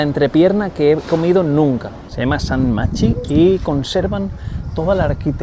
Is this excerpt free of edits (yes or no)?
no